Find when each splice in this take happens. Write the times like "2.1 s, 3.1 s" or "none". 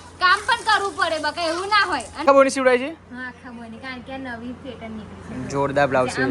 2.2 s